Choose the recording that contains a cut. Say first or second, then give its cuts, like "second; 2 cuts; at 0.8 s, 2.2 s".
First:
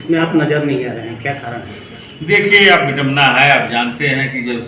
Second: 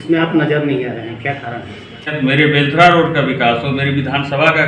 second; 1 cut; at 2.1 s